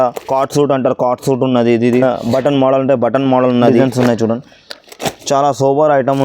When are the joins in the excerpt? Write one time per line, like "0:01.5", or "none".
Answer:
0:02.0
0:03.8